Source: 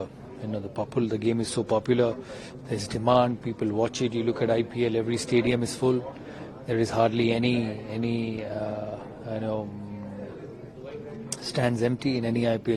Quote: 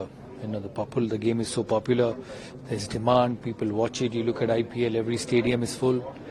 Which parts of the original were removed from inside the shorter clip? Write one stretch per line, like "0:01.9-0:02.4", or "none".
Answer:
none